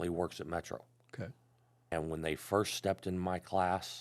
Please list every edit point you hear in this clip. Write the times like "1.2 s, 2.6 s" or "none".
1.9 s